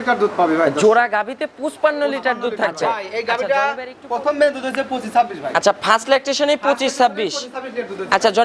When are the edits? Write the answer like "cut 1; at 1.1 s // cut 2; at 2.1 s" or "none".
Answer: cut 1; at 2.8 s